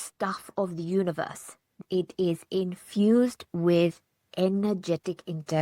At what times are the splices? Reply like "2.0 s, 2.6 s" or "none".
1.8 s